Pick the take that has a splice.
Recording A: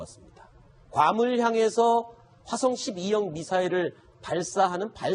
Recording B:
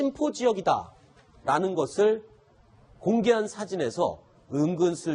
A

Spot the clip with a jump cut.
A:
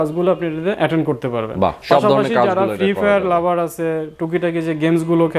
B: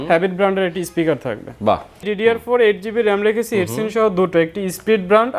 B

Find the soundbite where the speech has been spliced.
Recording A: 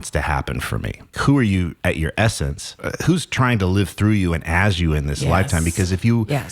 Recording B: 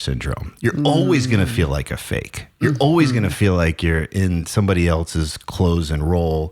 A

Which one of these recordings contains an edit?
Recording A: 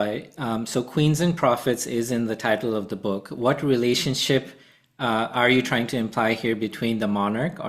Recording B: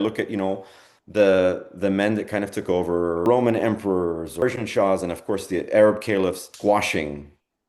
B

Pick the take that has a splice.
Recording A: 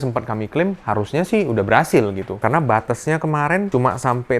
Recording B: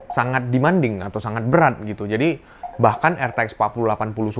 A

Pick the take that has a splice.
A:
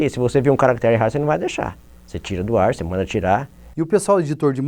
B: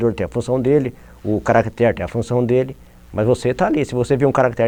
A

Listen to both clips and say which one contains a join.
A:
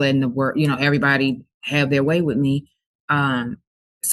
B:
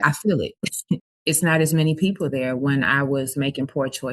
B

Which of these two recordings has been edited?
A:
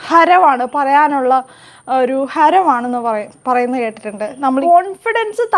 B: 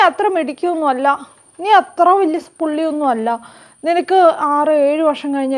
A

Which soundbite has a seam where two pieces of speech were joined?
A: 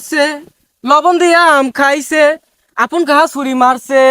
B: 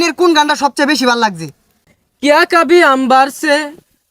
B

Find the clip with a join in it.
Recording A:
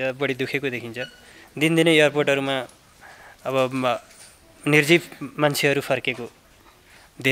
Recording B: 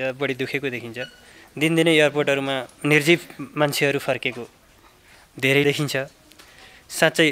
B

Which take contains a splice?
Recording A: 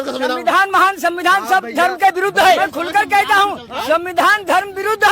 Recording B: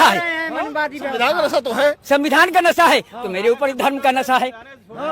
A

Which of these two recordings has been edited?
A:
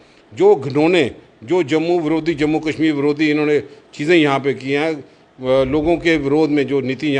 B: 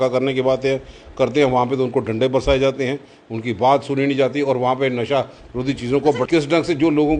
B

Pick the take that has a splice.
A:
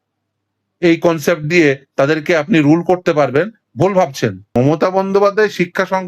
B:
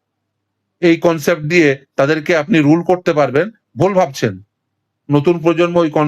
A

